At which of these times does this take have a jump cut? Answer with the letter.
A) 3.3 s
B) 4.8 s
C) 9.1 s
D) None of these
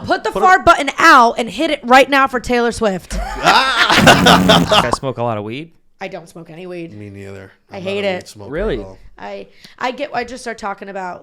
B